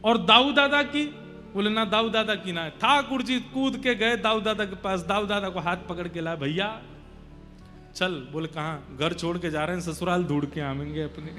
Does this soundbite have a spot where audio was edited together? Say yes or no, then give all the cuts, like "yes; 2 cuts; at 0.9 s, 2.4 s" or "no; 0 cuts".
no; 0 cuts